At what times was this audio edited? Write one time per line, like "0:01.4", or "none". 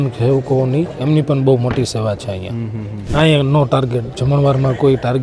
0:03.0